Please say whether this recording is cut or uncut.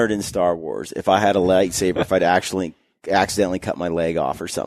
uncut